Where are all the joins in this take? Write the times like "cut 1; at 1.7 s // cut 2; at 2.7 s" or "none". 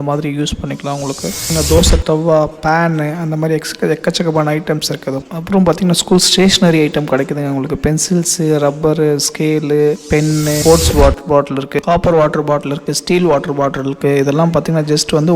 cut 1; at 1.5 s // cut 2; at 5.2 s // cut 3; at 10.6 s